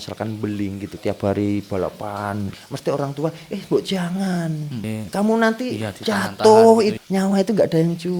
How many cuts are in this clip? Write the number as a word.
four